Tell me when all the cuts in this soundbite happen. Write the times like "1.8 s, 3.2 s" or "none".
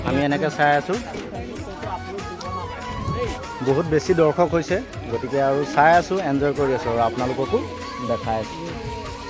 1.1 s